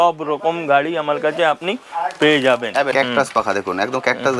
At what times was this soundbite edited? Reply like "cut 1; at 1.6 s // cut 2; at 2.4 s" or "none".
cut 1; at 2.9 s